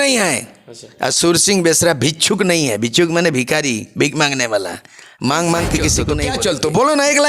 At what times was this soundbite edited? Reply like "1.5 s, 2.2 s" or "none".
6.2 s